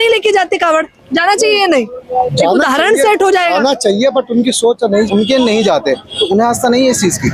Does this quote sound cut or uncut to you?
cut